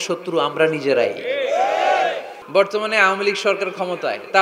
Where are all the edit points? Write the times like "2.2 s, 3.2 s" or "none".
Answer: 2.3 s